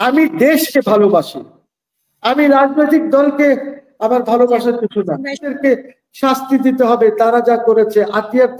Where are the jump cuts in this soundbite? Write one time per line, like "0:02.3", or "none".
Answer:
0:05.5